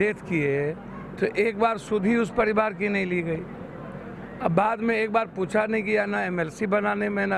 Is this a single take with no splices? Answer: yes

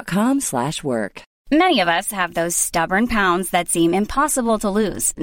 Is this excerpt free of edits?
no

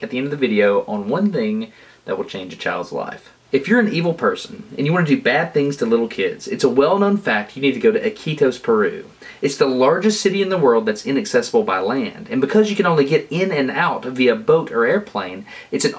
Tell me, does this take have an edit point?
no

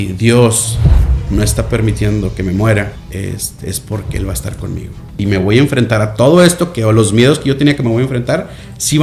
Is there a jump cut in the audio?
yes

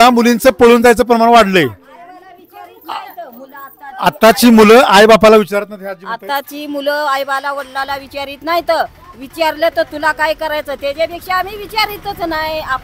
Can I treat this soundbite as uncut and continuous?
yes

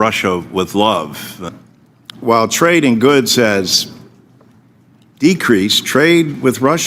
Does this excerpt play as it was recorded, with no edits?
no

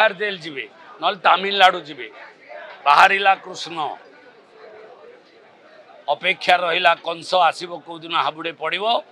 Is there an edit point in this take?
no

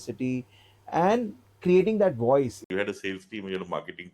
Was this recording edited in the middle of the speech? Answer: yes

